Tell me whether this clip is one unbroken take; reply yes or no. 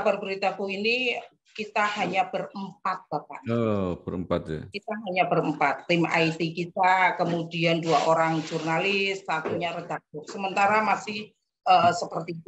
yes